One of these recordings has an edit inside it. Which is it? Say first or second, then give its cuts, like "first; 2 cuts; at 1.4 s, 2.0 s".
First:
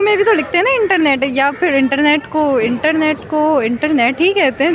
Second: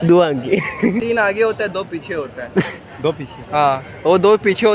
second; 1 cut; at 1.0 s